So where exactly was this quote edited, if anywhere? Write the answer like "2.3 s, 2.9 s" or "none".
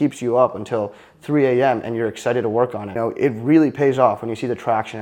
3.0 s